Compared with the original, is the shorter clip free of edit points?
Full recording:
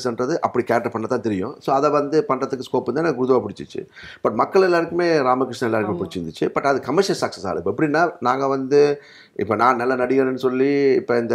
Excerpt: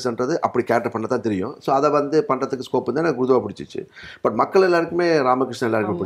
yes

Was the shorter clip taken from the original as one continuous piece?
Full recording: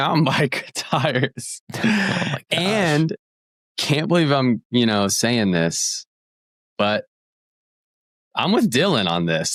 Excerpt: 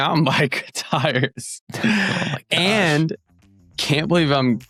yes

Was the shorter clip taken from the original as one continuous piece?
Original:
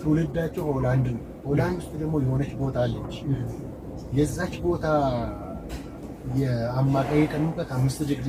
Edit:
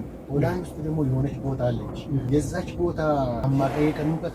no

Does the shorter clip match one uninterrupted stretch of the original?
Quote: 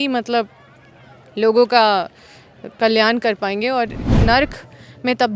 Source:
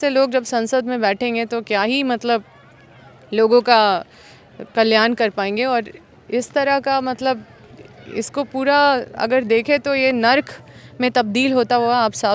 no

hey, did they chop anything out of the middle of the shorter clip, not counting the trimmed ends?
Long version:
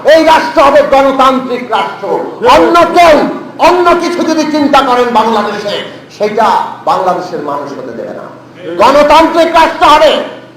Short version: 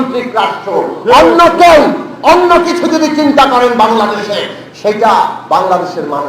no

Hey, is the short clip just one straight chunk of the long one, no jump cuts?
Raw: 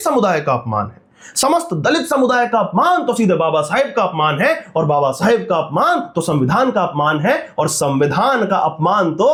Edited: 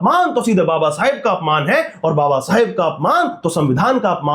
yes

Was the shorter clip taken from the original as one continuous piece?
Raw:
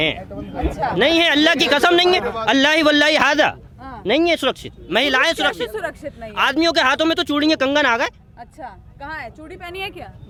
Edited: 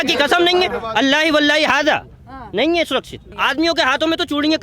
no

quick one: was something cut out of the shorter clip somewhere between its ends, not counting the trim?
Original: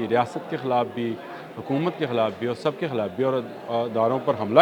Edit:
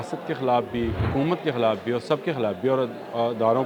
yes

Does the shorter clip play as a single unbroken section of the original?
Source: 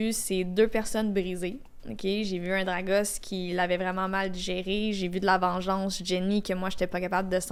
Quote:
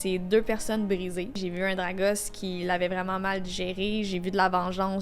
no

